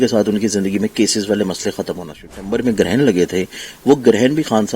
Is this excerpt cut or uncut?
cut